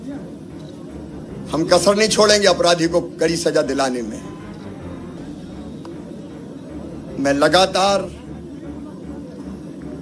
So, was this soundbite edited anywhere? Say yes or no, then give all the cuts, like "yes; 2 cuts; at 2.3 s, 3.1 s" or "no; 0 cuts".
no; 0 cuts